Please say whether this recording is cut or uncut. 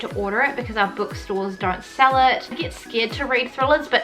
cut